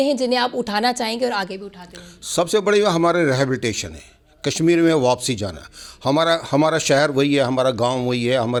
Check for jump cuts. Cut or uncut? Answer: uncut